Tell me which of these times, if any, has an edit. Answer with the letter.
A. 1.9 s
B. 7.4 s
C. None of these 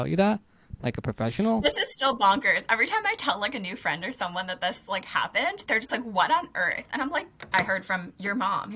B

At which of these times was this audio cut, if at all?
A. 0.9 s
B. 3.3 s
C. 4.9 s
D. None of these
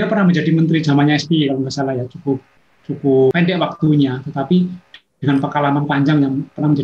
B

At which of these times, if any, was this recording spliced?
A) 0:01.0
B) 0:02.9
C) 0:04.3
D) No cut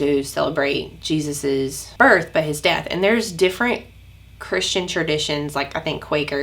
D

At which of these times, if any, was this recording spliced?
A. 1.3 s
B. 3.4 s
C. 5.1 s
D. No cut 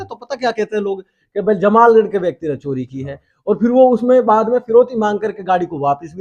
D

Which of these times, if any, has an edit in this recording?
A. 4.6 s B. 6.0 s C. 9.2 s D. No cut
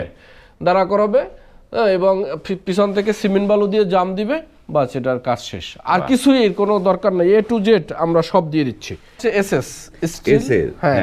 C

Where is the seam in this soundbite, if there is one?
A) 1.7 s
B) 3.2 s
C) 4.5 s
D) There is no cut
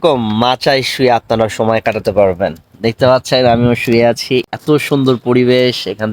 C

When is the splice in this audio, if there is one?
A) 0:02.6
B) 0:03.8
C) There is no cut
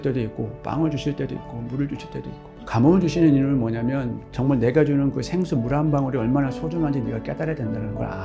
A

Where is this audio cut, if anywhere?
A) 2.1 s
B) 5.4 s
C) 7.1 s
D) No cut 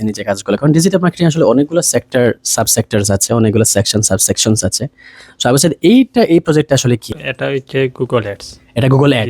C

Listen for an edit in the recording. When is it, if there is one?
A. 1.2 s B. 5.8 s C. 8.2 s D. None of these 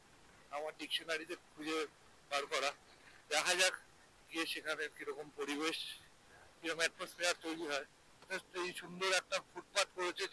C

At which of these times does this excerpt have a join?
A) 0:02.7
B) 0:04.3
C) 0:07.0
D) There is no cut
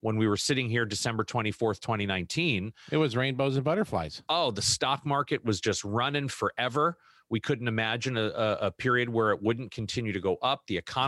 D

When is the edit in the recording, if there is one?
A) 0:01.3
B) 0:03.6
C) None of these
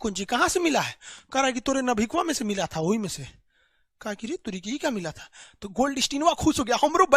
C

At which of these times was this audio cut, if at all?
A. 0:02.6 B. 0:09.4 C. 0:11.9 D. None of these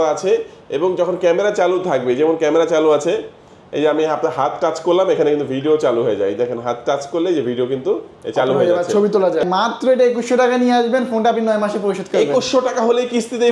B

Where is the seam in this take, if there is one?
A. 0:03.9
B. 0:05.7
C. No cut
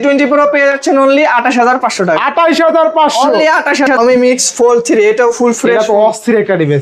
A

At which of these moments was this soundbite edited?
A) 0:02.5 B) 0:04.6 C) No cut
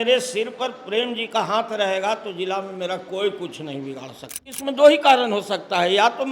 B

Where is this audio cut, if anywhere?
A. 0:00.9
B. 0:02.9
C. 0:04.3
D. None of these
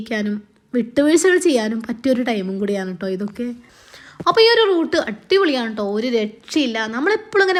D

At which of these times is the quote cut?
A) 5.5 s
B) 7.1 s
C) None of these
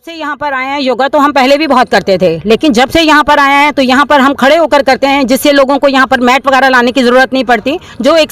C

